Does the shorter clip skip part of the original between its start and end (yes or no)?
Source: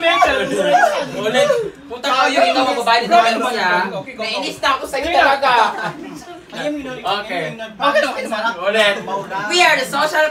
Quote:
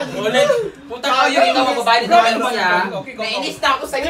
no